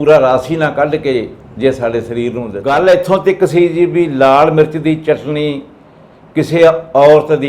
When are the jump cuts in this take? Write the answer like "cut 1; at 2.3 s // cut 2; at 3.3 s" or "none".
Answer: cut 1; at 2.5 s